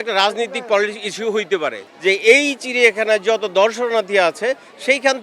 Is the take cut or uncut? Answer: cut